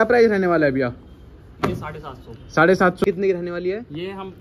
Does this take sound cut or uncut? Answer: cut